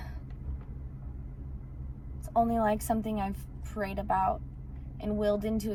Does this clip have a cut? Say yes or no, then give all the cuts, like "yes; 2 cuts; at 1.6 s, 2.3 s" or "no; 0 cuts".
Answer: no; 0 cuts